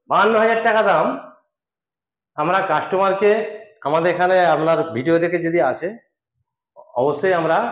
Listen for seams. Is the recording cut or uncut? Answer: uncut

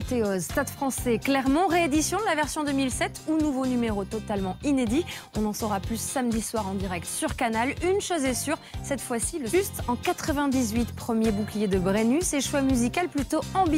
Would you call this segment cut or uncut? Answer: uncut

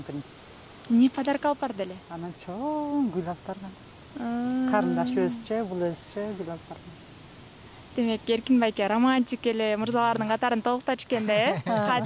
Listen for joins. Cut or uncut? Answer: uncut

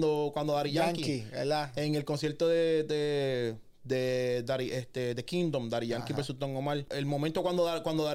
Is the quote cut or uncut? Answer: cut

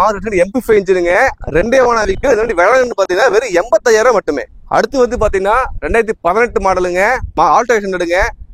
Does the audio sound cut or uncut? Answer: uncut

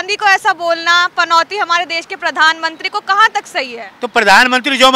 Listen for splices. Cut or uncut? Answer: uncut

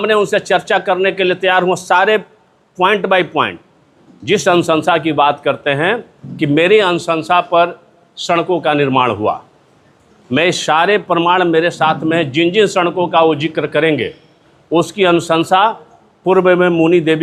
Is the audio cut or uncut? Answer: uncut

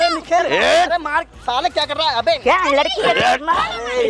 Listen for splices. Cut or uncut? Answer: uncut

